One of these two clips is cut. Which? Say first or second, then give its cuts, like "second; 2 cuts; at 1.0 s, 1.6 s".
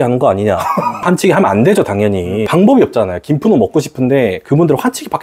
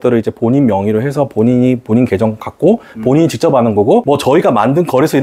first; 1 cut; at 2.5 s